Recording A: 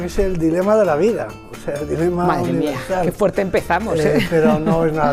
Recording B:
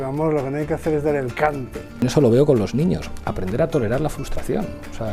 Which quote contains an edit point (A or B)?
B